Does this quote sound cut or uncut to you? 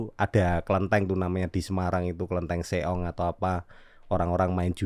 uncut